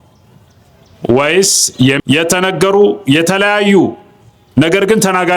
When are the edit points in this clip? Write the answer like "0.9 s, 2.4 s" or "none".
2.0 s